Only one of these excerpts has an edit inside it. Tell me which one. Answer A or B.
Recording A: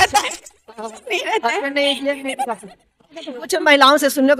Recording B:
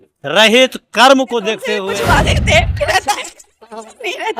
B